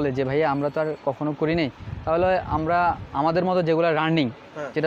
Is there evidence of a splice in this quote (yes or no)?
no